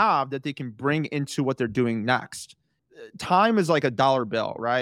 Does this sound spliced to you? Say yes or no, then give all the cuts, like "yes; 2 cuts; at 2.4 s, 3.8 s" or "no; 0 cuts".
yes; 1 cut; at 2.8 s